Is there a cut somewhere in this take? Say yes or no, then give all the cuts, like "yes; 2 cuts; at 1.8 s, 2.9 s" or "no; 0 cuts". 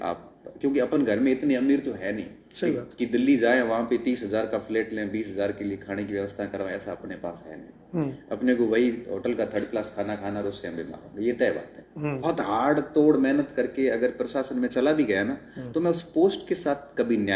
yes; 1 cut; at 12.2 s